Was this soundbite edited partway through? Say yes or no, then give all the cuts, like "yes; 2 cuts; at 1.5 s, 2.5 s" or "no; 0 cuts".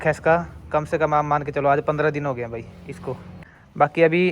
yes; 1 cut; at 3.3 s